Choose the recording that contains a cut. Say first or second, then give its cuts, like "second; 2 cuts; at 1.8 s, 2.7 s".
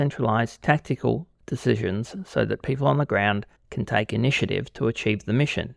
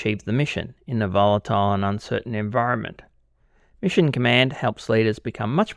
first; 1 cut; at 3.6 s